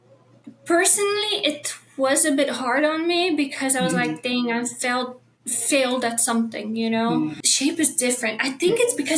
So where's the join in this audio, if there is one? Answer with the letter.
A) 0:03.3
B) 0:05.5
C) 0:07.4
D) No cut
C